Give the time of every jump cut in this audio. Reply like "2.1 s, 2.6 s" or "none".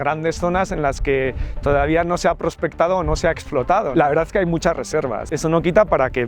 3.9 s, 5.3 s